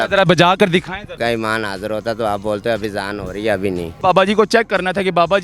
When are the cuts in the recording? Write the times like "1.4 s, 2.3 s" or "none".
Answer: 1.1 s, 3.9 s